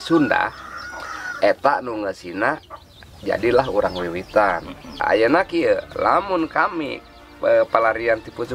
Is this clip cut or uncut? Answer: cut